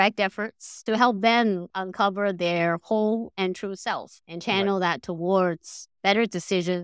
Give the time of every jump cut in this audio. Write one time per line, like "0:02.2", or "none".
0:00.8
0:01.7